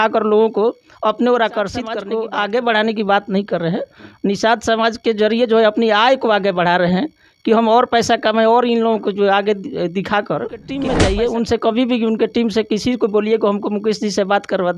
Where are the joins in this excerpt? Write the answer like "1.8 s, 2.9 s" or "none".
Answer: 2.0 s, 10.7 s